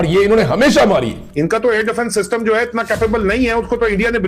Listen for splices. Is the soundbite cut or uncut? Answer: cut